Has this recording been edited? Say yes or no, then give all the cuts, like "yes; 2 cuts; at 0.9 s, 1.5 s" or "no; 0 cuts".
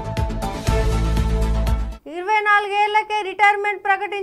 yes; 1 cut; at 1.9 s